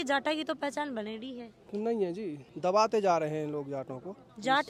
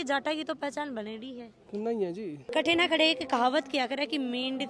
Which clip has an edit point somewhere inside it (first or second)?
second